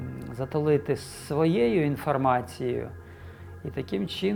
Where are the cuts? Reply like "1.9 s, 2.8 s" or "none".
none